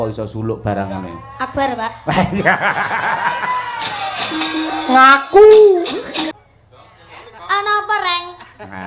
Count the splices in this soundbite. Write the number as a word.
one